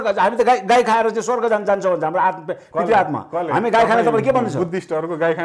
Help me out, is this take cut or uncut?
uncut